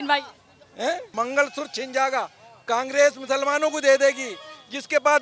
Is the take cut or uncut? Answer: cut